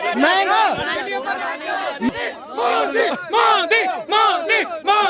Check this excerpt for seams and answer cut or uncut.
cut